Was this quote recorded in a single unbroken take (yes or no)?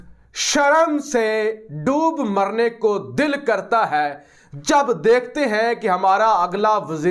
yes